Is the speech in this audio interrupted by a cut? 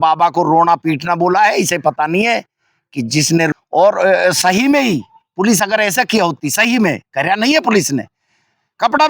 yes; 1 cut; at 3.5 s

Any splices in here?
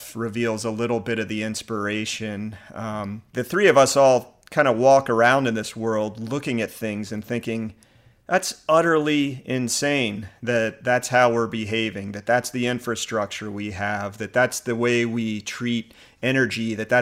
no; 0 cuts

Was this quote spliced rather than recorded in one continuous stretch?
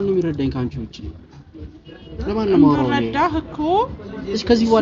no; 0 cuts

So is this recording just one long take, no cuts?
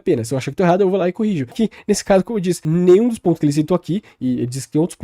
no; 2 cuts; at 1.5 s, 2.6 s

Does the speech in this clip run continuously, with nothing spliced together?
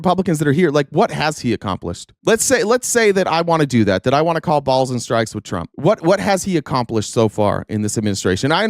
yes; 0 cuts

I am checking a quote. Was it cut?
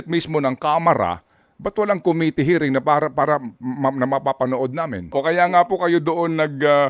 yes; 1 cut; at 5.1 s

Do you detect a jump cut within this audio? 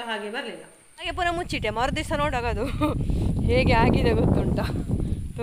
yes; 1 cut; at 1.1 s

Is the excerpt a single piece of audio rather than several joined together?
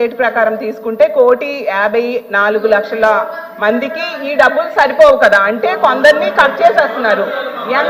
yes; 0 cuts

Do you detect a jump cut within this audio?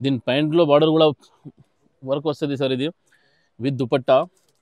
no; 0 cuts

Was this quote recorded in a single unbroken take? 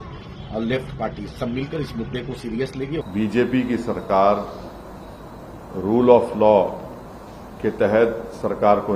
no; 1 cut; at 3.1 s

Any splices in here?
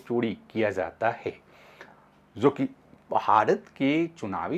no; 0 cuts

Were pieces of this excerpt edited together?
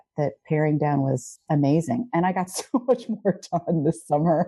no; 0 cuts

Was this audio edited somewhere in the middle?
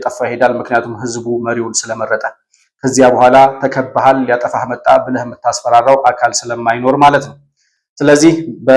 no; 0 cuts

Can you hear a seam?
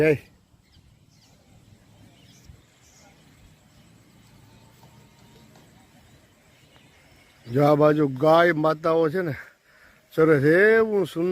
no; 0 cuts

